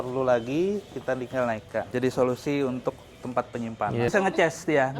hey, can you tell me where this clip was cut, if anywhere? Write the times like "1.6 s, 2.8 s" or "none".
1.8 s, 4.1 s